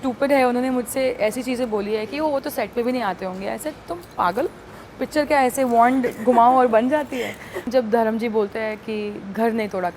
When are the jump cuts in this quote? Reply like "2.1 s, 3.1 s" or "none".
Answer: 7.6 s